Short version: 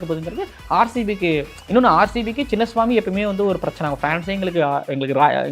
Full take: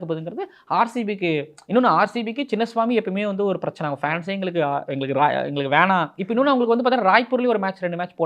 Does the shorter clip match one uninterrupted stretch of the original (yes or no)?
yes